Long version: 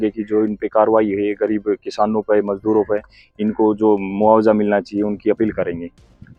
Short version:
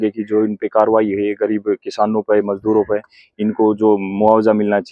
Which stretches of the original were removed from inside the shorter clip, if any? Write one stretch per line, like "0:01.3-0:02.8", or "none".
none